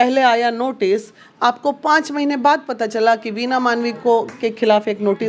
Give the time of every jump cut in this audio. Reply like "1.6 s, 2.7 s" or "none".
none